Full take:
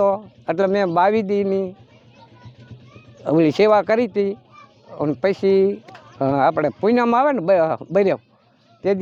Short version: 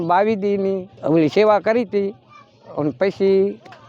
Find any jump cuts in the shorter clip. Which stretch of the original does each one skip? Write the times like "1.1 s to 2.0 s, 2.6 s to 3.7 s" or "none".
1.8 s to 3.1 s